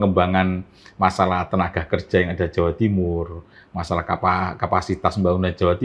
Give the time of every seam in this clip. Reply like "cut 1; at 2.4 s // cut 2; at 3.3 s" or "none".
none